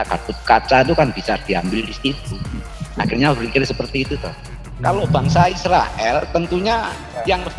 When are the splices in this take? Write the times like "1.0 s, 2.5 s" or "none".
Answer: 4.7 s